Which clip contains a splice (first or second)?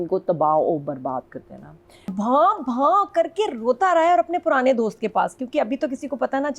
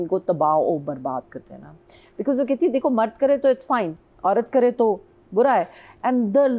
first